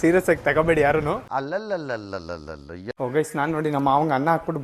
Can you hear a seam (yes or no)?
yes